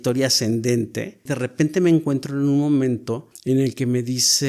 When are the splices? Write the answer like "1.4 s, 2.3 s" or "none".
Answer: 1.4 s, 3.3 s